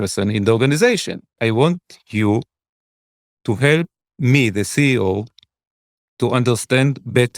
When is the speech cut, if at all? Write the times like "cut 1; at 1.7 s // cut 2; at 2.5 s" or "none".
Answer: cut 1; at 1.3 s

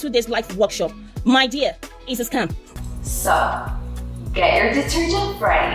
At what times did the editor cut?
cut 1; at 2.6 s

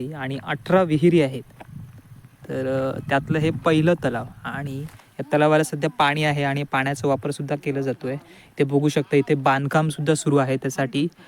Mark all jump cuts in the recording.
none

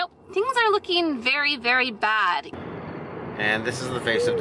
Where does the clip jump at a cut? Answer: cut 1; at 2.5 s

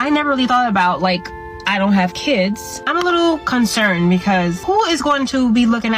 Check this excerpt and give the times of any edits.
cut 1; at 2.8 s // cut 2; at 4.6 s

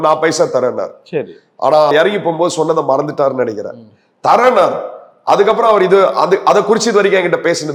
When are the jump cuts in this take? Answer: none

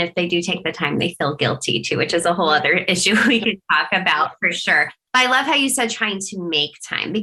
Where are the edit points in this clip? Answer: none

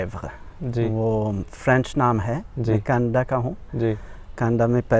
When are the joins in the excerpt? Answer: none

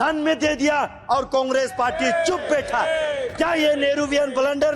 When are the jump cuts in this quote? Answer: none

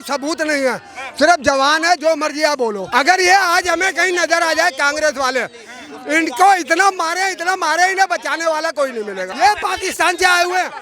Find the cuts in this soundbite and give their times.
cut 1; at 2.8 s // cut 2; at 9.3 s

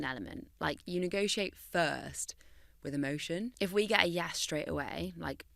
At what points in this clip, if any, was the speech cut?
cut 1; at 3.5 s

